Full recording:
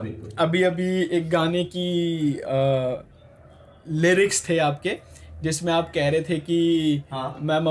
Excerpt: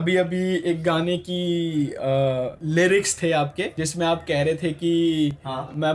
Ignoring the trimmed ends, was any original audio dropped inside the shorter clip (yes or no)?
yes